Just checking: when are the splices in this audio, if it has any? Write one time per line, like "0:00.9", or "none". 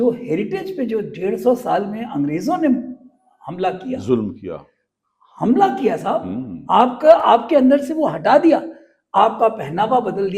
none